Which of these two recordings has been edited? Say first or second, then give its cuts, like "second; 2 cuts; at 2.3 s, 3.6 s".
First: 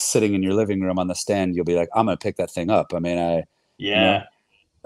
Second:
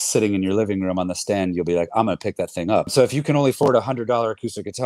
second; 1 cut; at 2.9 s